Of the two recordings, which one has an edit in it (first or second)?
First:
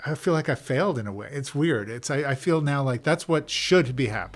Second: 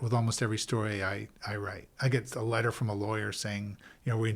first